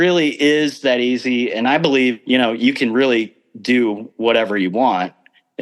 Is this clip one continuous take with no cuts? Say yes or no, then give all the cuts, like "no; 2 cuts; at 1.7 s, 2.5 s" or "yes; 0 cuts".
yes; 0 cuts